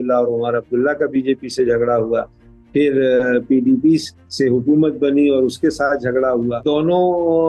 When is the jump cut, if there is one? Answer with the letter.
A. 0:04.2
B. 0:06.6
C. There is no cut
B